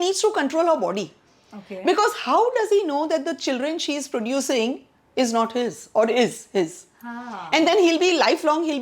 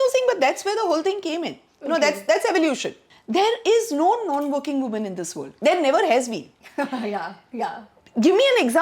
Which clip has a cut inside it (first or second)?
second